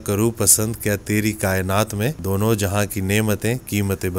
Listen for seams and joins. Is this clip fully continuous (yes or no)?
no